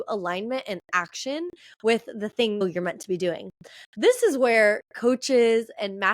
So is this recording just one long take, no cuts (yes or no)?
no